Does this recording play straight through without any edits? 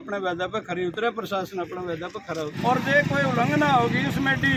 no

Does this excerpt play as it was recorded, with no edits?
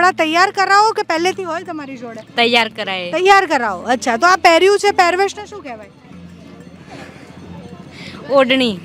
yes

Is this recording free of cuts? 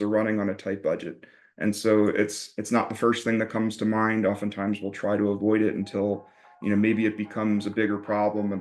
yes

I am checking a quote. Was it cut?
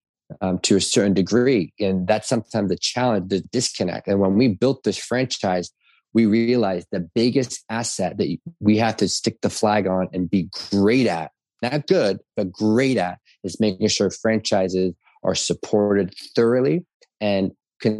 yes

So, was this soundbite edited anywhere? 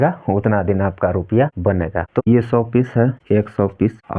yes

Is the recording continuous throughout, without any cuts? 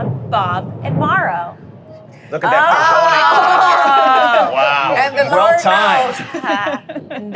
yes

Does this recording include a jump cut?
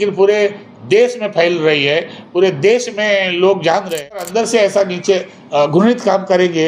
yes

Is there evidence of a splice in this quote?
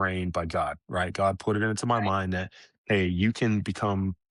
no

